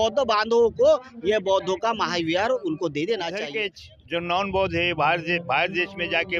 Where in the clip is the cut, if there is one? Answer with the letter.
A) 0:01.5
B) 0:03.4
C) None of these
B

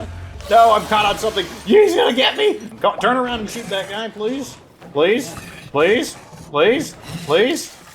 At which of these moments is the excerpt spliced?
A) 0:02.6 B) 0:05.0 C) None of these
A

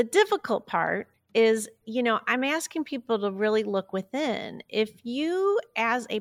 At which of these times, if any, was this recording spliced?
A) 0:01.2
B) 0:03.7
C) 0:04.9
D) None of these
A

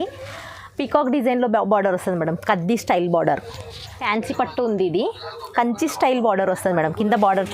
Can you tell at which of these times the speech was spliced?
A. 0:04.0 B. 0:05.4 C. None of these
A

